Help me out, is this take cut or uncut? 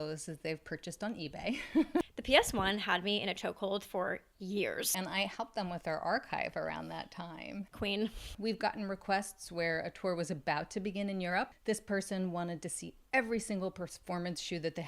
cut